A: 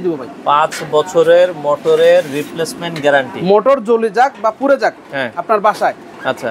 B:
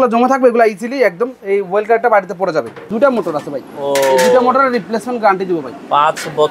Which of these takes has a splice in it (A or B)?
B